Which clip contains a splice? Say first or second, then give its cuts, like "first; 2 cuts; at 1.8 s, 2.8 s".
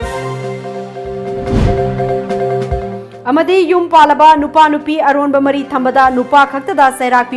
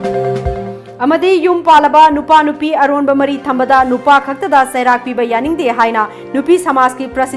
first; 1 cut; at 1.3 s